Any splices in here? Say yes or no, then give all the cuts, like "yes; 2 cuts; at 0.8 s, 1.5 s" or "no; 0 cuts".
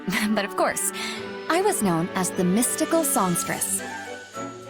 yes; 1 cut; at 3.6 s